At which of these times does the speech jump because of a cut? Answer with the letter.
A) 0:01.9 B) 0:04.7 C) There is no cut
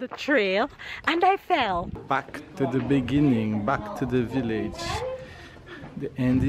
A